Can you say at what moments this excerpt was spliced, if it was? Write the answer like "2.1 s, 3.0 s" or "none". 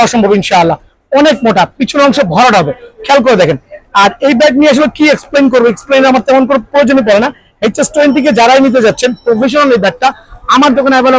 none